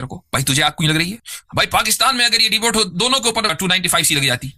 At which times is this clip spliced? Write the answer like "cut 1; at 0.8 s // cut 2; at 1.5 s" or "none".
cut 1; at 1.3 s // cut 2; at 3.5 s